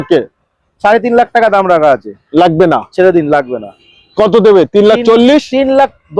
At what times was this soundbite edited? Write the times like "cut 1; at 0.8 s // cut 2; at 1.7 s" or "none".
none